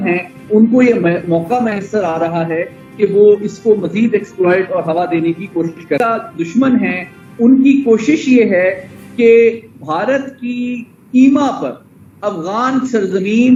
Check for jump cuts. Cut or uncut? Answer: uncut